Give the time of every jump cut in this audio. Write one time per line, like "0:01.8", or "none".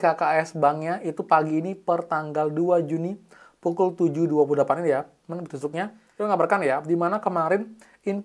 0:06.0